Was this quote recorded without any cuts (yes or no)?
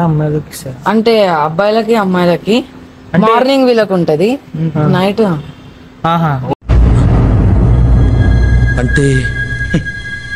yes